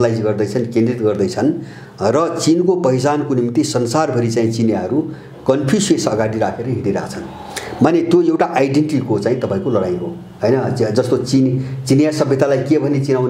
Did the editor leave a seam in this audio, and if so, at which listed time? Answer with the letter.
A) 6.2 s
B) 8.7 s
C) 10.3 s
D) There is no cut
D